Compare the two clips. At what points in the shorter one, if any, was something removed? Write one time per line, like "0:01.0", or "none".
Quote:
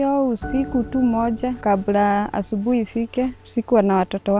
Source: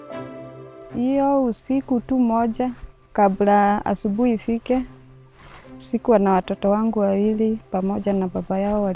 0:01.6
0:03.4